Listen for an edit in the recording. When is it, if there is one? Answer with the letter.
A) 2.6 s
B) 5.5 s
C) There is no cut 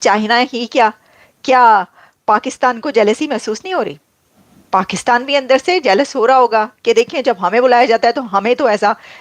C